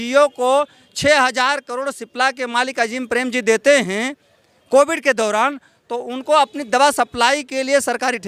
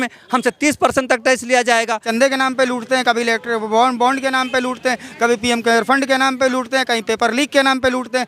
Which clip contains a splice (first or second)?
second